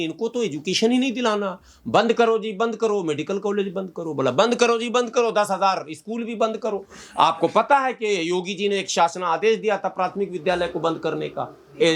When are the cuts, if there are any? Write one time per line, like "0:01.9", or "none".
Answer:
none